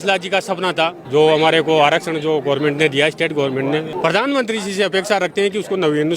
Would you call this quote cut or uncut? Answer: cut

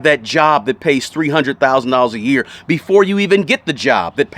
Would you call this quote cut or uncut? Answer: uncut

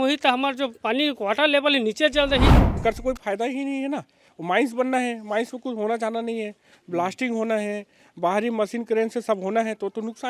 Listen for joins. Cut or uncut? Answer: cut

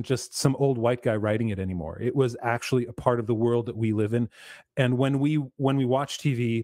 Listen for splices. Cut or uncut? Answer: uncut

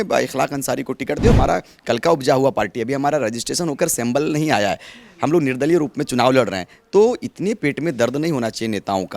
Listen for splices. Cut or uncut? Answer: cut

